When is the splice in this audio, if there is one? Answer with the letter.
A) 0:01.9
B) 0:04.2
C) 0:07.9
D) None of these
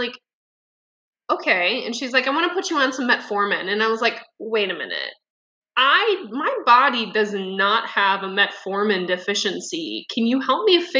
D